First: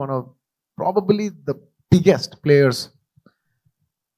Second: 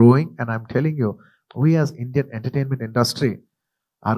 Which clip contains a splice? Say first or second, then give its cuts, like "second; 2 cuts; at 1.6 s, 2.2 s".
second; 1 cut; at 1.4 s